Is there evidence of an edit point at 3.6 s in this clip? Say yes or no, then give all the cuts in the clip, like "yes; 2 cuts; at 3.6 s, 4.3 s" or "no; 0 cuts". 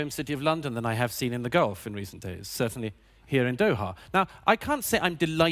yes; 1 cut; at 3.6 s